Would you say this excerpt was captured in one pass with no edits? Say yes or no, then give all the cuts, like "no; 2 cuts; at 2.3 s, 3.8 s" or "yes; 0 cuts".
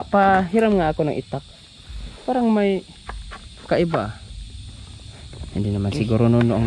yes; 0 cuts